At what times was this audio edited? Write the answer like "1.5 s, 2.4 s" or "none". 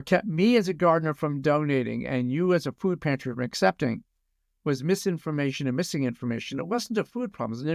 none